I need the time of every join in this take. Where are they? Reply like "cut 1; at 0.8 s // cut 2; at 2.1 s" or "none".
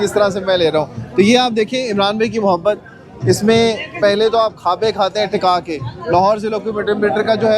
none